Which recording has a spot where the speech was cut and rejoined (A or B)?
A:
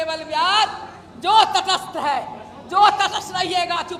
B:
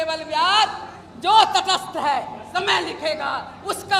B